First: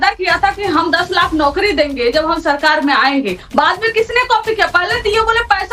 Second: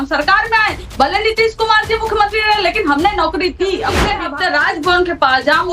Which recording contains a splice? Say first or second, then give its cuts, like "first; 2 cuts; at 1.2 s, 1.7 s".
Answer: second; 1 cut; at 4.1 s